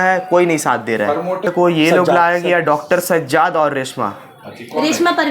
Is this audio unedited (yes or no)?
yes